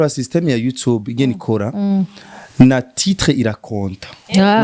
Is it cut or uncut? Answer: uncut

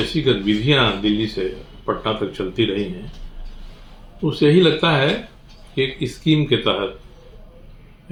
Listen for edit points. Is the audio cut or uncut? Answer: uncut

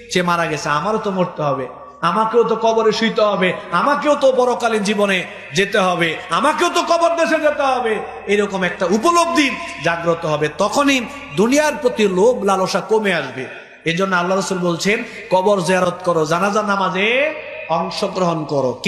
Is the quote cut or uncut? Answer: uncut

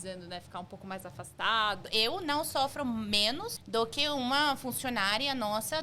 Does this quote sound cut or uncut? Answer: cut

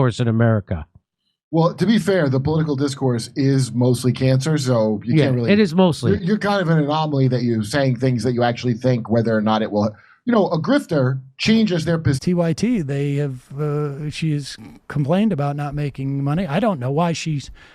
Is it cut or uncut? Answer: cut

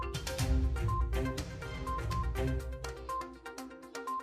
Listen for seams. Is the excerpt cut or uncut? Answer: uncut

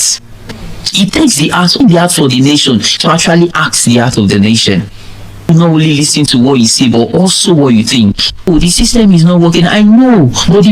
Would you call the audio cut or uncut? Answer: cut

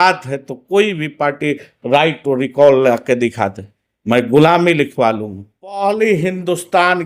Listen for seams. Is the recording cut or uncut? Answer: cut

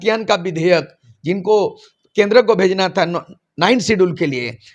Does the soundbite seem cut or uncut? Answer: uncut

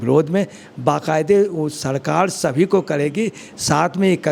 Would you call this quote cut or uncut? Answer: uncut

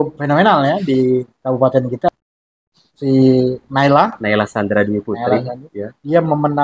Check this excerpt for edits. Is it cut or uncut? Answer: cut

